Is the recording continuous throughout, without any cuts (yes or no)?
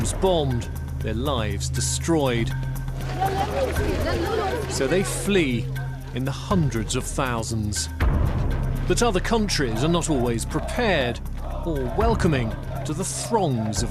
yes